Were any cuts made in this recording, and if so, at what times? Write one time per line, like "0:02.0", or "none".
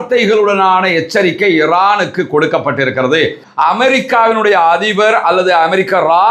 0:03.4